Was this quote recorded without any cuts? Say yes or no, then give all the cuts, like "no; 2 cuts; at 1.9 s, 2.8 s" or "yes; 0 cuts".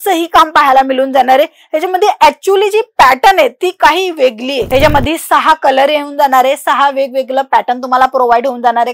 no; 1 cut; at 4.6 s